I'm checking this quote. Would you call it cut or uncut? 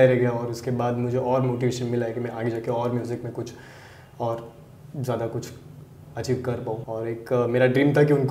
cut